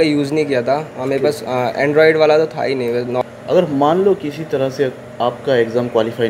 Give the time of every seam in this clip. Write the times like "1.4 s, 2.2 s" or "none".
3.2 s